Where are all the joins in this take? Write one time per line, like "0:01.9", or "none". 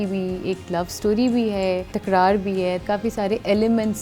0:01.9
0:02.8